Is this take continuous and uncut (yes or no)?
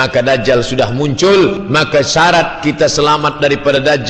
no